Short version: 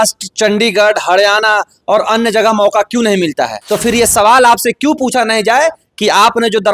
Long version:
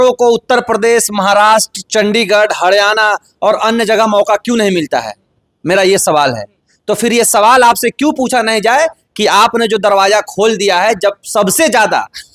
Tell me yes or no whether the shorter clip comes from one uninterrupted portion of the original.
no